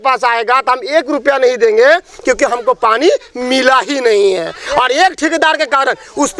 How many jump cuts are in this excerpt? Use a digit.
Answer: 0